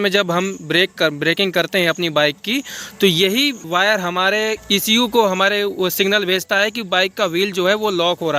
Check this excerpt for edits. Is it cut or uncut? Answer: cut